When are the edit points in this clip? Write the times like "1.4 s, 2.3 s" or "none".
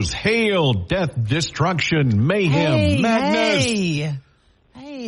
none